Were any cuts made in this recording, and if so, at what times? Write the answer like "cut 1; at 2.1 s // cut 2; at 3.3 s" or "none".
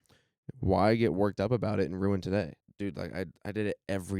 cut 1; at 2.6 s